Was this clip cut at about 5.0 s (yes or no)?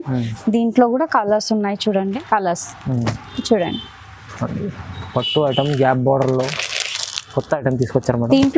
no